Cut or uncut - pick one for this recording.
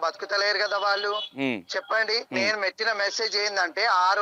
cut